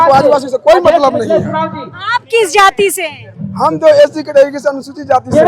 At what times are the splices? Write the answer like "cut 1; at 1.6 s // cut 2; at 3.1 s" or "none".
none

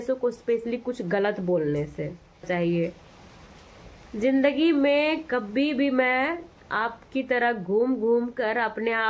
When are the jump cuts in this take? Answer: cut 1; at 2.4 s

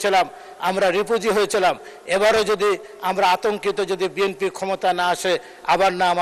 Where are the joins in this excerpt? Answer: none

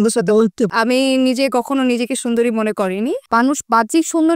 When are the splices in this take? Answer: cut 1; at 3.2 s

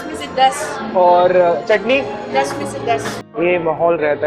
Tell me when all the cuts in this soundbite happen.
cut 1; at 3.3 s

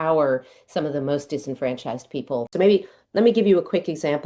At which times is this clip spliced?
cut 1; at 2.5 s

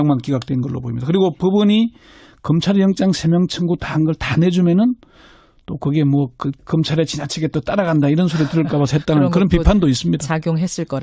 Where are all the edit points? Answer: none

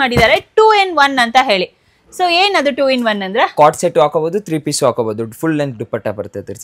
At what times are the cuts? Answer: none

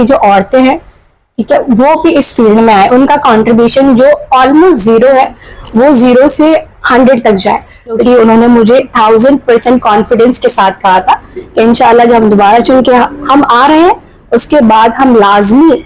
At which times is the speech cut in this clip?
cut 1; at 8.0 s

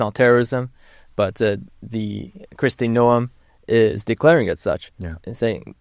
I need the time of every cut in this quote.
none

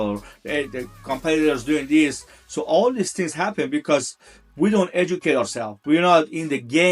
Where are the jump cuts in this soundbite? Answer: none

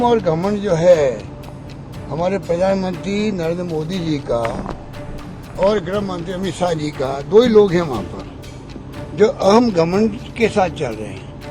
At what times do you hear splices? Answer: none

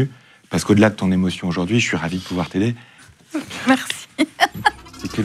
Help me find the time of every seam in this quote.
cut 1; at 3.1 s

